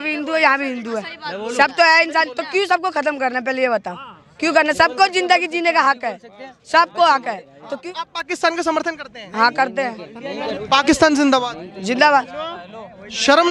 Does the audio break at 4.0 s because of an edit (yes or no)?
no